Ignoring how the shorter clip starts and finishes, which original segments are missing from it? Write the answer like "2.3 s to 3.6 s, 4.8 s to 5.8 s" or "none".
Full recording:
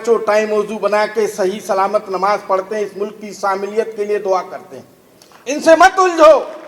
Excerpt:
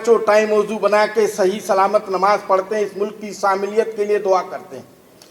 none